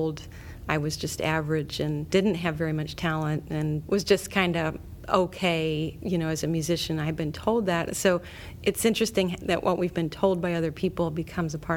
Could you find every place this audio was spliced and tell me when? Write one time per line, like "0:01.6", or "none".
0:02.1
0:03.8
0:06.0